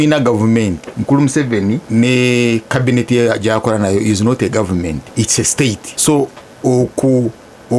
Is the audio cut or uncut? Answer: cut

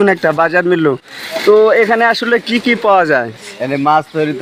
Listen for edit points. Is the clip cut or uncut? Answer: uncut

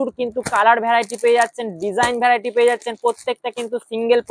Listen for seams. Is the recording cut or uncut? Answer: uncut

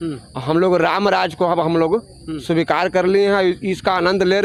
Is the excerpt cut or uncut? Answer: uncut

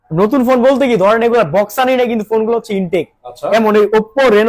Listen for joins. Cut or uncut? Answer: uncut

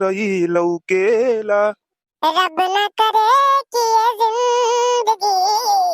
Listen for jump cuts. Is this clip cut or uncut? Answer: cut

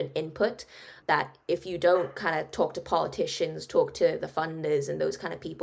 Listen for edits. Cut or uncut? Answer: cut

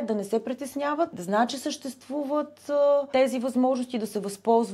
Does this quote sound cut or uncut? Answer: cut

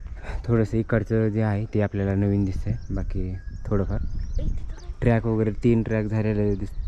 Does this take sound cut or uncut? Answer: uncut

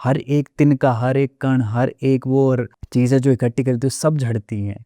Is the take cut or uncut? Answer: cut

